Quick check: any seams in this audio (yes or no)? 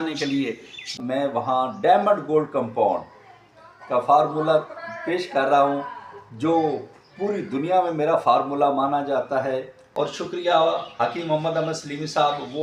yes